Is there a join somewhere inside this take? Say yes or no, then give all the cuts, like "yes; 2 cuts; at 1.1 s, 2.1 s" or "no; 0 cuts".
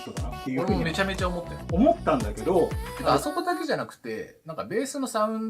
no; 0 cuts